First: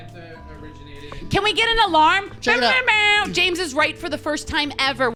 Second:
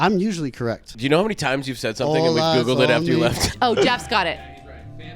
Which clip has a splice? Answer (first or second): second